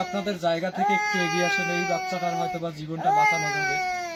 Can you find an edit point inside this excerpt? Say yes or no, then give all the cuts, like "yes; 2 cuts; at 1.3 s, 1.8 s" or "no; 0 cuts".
no; 0 cuts